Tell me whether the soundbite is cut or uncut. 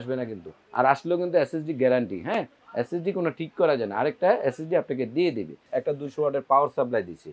cut